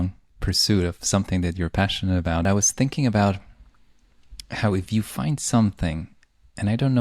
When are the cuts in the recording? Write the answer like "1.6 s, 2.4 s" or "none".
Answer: 2.4 s